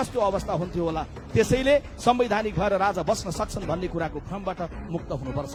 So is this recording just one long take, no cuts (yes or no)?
yes